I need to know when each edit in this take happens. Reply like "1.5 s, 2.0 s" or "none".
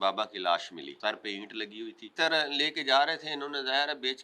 0.9 s, 2.1 s